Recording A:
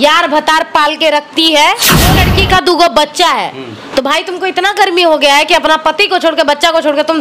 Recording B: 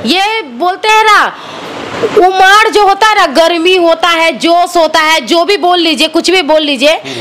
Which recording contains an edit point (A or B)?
A